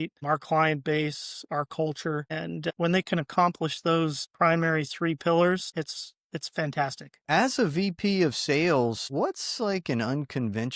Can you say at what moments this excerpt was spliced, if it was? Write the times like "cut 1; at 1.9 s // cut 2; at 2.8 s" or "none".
cut 1; at 7.2 s